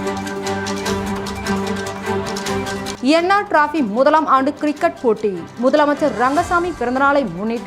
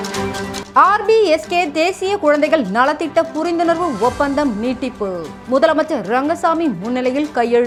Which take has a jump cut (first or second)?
first